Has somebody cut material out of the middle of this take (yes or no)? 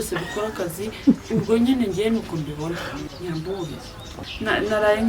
yes